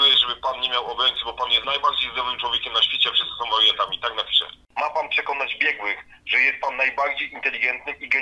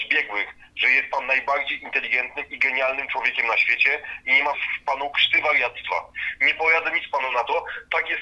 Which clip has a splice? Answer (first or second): first